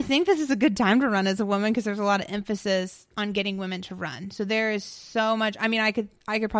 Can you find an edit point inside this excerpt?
no; 0 cuts

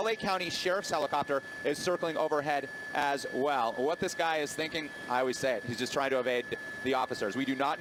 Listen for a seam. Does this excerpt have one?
no; 0 cuts

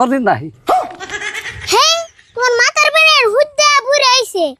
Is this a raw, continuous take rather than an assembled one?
yes; 0 cuts

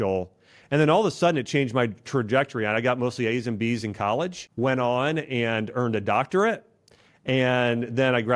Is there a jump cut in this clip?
yes; 1 cut; at 4.4 s

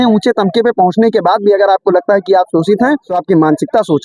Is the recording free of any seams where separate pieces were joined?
no; 1 cut; at 3.1 s

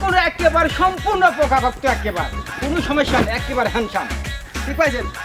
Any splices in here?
no; 0 cuts

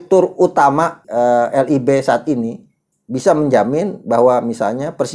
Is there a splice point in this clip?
yes; 1 cut; at 1.0 s

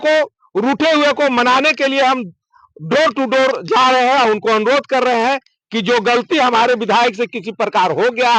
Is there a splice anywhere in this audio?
no; 0 cuts

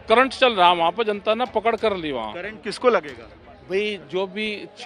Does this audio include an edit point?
no; 0 cuts

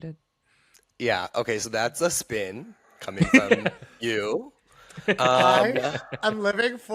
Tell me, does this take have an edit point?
no; 0 cuts

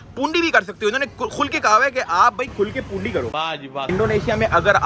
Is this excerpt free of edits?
no; 1 cut; at 3.8 s

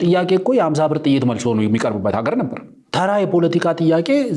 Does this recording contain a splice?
no; 0 cuts

